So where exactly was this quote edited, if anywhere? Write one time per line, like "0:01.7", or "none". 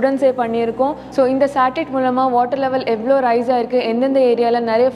0:01.0